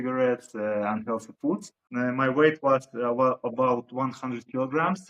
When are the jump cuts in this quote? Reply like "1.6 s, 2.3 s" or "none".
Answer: 1.8 s